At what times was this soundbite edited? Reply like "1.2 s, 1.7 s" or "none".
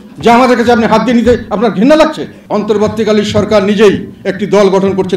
2.3 s